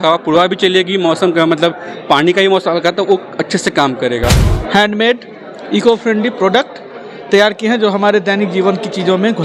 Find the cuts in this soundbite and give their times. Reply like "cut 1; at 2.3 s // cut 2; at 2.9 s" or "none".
cut 1; at 4.5 s